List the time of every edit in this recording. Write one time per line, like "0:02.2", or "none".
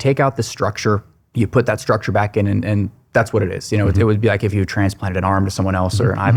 none